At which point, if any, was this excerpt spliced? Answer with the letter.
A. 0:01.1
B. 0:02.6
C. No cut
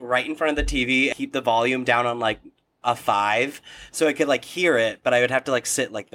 A